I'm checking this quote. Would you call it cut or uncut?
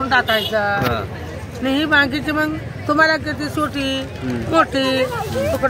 uncut